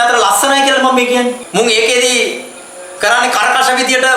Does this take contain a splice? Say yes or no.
yes